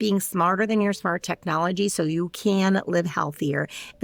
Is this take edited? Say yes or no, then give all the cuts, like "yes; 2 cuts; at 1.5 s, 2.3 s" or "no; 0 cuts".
no; 0 cuts